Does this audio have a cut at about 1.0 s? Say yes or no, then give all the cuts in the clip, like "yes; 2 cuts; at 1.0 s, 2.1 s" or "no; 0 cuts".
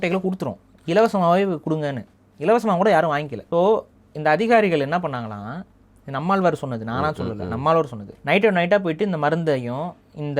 no; 2 cuts; at 3.4 s, 8.1 s